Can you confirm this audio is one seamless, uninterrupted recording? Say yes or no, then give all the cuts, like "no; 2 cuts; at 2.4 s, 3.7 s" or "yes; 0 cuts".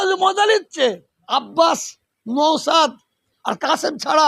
no; 1 cut; at 1.1 s